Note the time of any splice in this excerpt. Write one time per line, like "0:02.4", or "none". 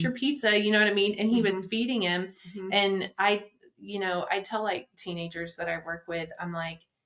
none